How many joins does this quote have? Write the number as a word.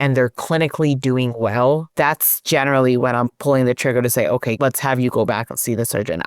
two